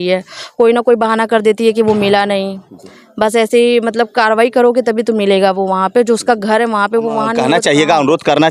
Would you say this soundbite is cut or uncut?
cut